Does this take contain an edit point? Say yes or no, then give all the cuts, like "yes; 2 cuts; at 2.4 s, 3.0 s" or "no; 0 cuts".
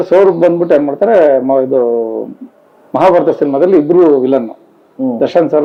no; 0 cuts